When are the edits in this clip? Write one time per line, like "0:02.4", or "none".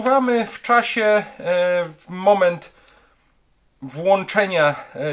none